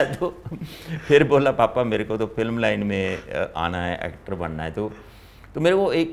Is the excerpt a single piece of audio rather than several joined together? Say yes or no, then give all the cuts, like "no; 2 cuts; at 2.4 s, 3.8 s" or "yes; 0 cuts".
yes; 0 cuts